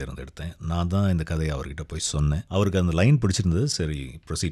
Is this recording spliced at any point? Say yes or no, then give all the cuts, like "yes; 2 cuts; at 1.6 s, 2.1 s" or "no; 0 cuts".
yes; 1 cut; at 2.4 s